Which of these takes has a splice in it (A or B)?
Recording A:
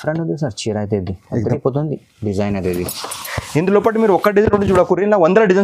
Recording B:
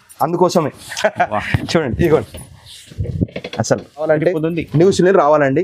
B